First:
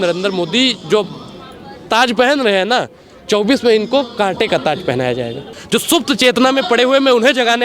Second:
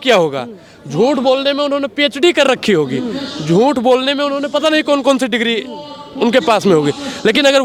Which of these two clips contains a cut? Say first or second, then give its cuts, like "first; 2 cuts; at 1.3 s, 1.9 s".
first; 1 cut; at 5.5 s